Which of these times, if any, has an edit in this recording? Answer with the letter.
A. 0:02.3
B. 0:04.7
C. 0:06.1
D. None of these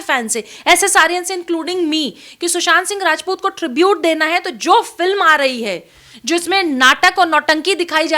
D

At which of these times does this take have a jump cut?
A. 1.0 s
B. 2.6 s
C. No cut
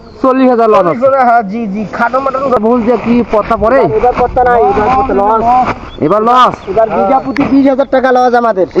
B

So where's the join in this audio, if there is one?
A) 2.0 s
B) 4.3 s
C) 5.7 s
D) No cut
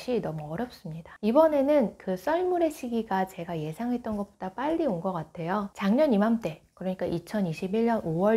C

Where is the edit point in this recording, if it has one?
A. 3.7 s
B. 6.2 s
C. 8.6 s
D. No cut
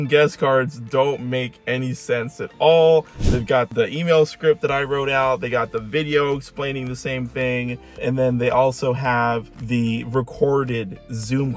A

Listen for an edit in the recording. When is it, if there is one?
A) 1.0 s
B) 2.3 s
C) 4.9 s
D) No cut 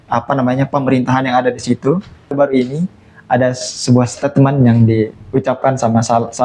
B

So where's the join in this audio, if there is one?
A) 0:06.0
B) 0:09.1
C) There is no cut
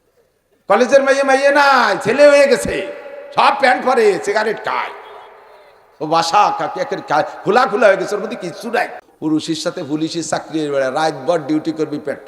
B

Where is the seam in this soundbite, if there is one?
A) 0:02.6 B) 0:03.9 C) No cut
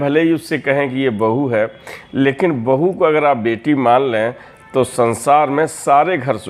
C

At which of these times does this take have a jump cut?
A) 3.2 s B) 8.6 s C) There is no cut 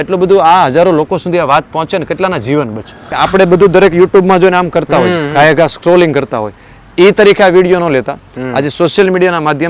A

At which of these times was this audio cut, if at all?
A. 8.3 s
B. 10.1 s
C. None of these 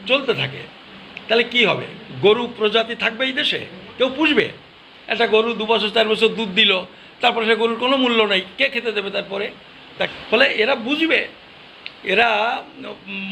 B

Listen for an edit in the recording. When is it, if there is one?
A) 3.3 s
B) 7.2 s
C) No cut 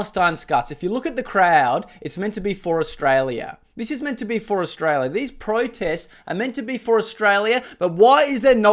C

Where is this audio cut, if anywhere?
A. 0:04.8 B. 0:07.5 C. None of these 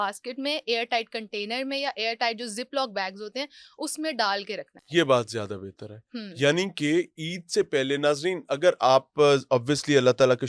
C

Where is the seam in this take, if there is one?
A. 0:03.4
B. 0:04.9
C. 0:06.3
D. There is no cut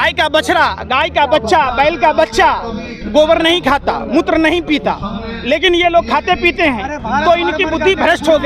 D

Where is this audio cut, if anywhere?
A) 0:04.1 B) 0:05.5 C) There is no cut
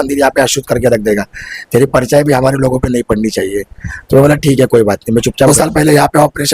B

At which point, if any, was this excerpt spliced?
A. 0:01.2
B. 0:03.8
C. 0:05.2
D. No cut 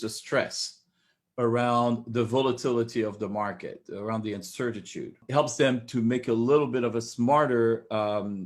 C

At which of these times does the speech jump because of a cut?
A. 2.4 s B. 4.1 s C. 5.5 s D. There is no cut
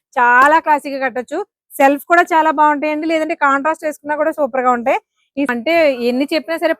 C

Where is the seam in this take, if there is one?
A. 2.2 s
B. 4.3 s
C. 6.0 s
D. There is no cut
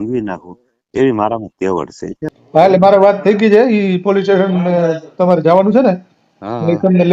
A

